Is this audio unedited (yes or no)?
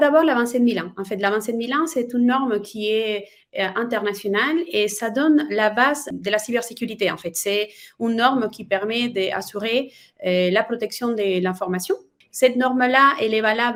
yes